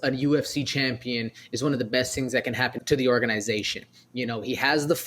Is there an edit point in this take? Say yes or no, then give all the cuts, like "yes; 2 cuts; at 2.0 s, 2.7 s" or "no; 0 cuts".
yes; 1 cut; at 2.8 s